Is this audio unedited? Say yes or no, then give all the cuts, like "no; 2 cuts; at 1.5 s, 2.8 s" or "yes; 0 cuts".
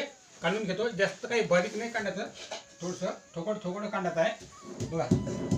yes; 0 cuts